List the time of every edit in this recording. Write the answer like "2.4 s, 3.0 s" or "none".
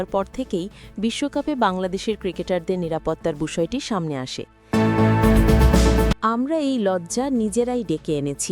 4.7 s, 6.1 s